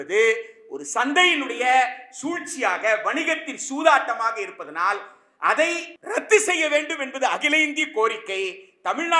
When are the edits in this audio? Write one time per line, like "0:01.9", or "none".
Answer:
0:05.9